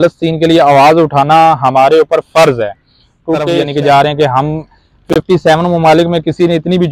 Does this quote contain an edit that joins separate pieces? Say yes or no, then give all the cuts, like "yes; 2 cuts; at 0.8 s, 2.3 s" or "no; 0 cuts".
yes; 1 cut; at 3.5 s